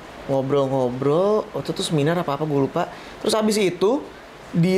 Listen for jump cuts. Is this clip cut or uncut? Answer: uncut